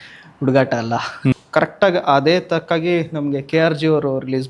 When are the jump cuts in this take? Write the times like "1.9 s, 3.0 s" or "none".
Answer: 1.3 s